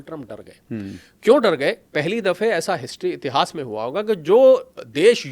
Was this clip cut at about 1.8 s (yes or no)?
yes